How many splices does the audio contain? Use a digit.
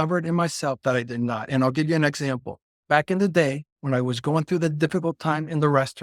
0